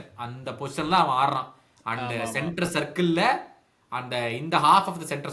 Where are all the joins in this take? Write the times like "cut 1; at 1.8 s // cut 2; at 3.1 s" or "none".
none